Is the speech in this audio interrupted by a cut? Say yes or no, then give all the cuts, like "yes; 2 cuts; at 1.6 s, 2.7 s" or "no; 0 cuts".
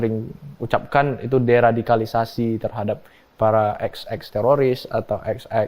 no; 0 cuts